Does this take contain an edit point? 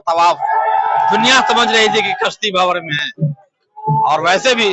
no; 0 cuts

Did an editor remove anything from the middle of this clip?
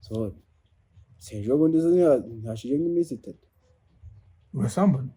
no; 0 cuts

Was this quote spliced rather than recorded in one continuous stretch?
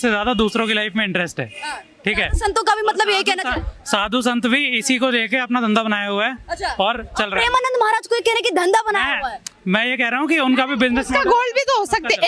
no; 0 cuts

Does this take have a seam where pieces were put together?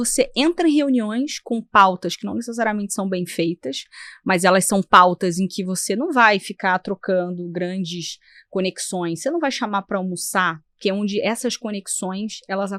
no; 0 cuts

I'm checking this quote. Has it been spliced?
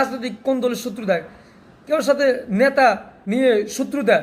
yes; 1 cut; at 3.1 s

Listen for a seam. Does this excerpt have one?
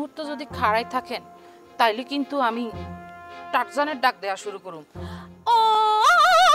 no; 0 cuts

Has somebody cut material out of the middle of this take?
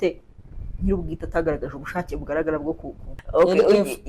yes; 1 cut; at 3.2 s

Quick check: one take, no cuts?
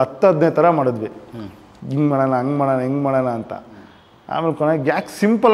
yes; 0 cuts

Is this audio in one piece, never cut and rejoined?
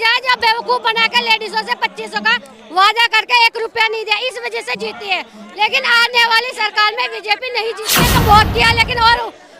no; 1 cut; at 8.0 s

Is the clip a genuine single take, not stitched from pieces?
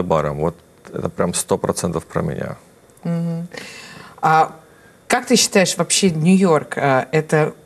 yes; 0 cuts

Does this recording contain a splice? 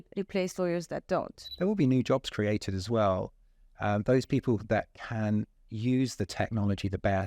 yes; 1 cut; at 1.4 s

